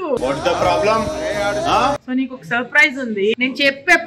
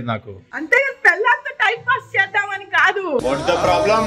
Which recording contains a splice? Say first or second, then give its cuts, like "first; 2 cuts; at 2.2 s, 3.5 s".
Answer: first; 2 cuts; at 2.0 s, 3.4 s